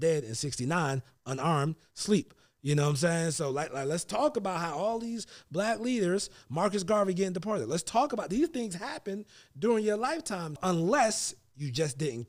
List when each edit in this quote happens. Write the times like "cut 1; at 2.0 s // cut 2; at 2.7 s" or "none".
cut 1; at 10.6 s